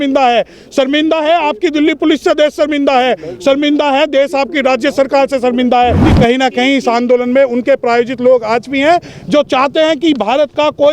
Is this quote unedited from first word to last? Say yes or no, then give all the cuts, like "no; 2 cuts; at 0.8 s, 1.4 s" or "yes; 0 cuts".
no; 1 cut; at 6.1 s